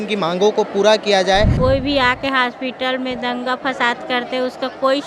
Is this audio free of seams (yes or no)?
no